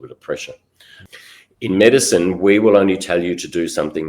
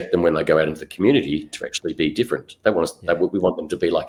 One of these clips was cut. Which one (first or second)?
first